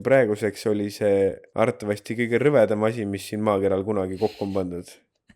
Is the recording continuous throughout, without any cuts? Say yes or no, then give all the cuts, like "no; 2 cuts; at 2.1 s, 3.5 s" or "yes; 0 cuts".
no; 1 cut; at 1.4 s